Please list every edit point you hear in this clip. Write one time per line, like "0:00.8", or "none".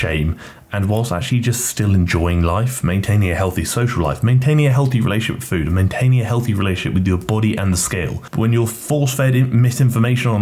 0:08.2